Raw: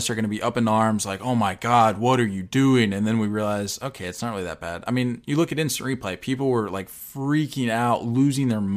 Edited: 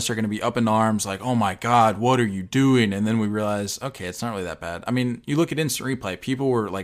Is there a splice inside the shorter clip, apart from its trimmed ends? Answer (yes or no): no